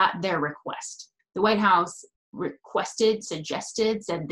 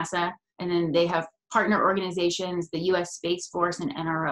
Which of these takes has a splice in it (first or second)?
first